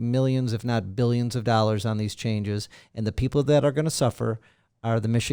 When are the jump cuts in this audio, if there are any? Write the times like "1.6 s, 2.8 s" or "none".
none